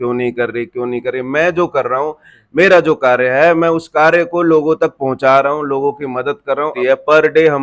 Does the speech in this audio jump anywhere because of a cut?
yes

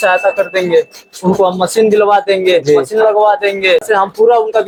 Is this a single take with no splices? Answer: yes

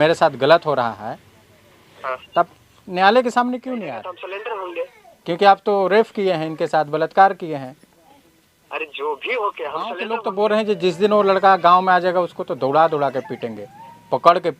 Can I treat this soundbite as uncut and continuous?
no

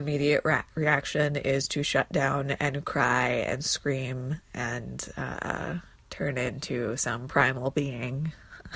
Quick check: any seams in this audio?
yes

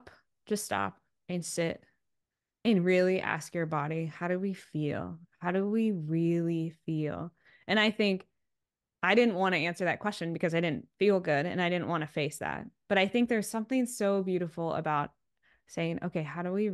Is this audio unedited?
yes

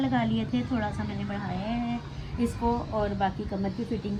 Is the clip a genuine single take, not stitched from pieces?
yes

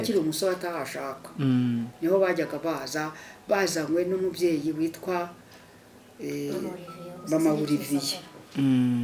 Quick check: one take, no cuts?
yes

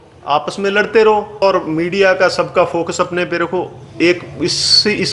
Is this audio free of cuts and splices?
no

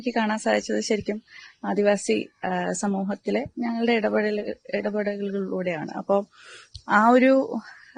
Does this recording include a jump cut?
no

